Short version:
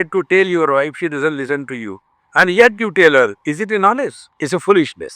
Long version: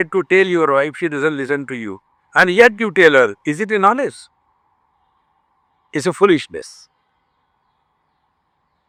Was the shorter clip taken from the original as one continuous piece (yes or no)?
no